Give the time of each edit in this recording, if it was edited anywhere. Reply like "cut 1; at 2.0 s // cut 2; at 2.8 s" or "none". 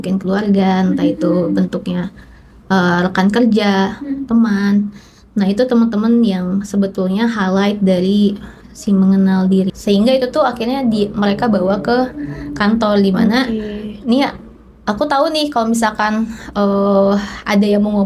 cut 1; at 9.7 s